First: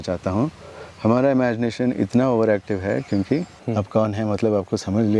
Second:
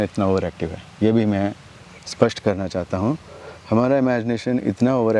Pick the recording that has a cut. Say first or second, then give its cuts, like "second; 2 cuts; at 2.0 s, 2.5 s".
first; 1 cut; at 3.6 s